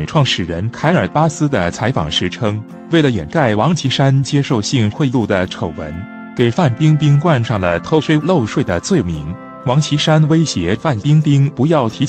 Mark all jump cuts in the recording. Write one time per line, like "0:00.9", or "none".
none